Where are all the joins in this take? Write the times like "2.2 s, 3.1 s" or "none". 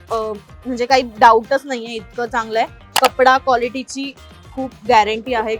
2.8 s